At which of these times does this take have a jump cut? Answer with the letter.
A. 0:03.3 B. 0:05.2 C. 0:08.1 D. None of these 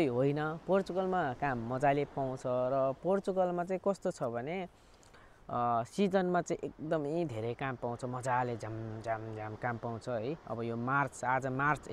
D